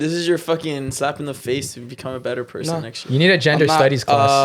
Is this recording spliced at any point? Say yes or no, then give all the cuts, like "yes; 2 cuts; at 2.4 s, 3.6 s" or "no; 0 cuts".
no; 0 cuts